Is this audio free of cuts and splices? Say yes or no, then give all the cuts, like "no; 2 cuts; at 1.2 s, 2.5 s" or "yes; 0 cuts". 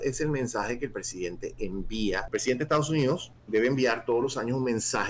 no; 2 cuts; at 2.3 s, 3.3 s